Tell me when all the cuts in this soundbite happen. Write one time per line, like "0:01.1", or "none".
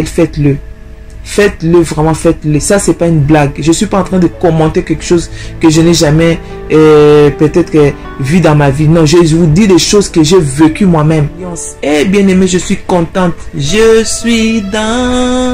0:11.7